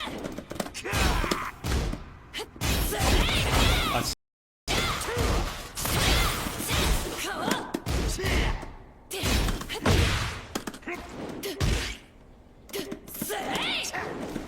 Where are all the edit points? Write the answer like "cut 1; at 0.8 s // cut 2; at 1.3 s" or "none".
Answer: cut 1; at 4.0 s